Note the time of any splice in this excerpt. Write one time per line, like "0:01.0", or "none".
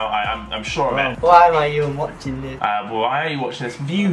0:01.0